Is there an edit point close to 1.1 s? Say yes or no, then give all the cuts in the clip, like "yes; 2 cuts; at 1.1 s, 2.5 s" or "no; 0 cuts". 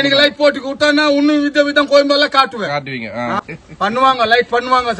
no; 1 cut; at 3.4 s